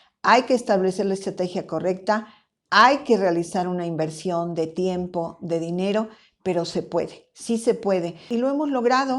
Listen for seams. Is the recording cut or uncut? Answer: cut